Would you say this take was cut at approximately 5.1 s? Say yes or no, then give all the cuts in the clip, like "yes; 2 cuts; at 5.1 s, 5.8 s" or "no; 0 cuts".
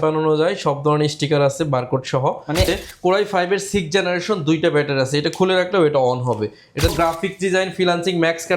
no; 2 cuts; at 2.7 s, 6.9 s